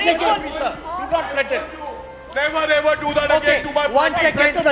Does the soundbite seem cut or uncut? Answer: uncut